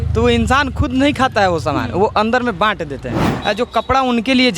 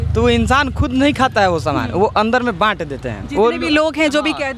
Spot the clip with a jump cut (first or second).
first